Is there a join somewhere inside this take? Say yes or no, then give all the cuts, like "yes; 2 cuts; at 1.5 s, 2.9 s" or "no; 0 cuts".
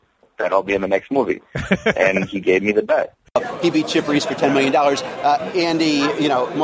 yes; 1 cut; at 3.3 s